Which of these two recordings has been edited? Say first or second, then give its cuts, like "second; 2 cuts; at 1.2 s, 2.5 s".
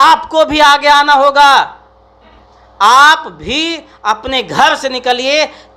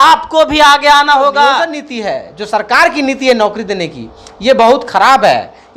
second; 1 cut; at 1.8 s